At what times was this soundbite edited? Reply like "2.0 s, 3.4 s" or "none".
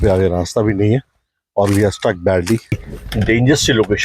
2.8 s